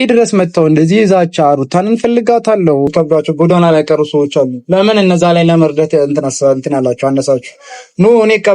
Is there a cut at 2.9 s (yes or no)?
yes